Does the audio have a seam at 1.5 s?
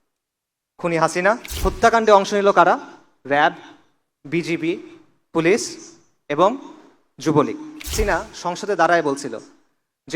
yes; 2 cuts; at 1.5 s, 7.9 s

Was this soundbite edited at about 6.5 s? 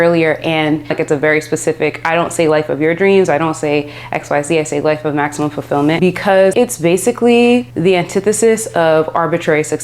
yes; 3 cuts; at 0.9 s, 6.5 s, 7.7 s

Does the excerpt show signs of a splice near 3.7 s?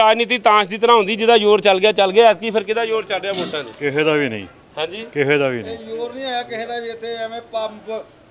no; 0 cuts

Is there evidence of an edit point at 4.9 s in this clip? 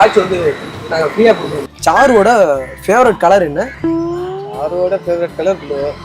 no; 2 cuts; at 1.6 s, 3.7 s

